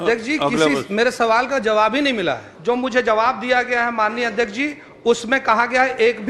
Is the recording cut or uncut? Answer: cut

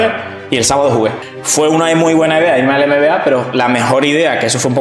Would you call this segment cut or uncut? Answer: cut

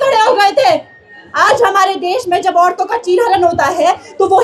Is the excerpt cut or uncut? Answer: uncut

